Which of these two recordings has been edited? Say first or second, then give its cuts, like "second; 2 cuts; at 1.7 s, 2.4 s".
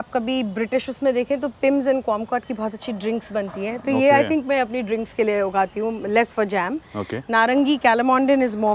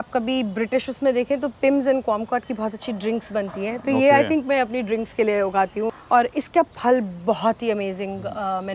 second; 1 cut; at 6.0 s